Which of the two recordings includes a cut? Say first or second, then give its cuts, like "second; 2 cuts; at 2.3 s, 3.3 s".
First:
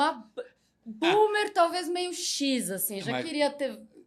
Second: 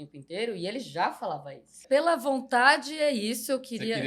second; 1 cut; at 1.8 s